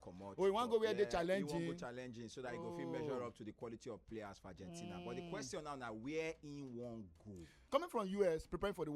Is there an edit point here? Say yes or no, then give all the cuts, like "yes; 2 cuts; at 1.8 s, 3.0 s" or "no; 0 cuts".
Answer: yes; 1 cut; at 7.5 s